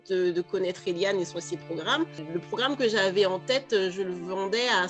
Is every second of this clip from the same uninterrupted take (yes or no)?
yes